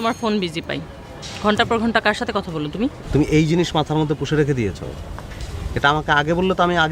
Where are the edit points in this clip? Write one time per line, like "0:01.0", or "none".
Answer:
0:03.0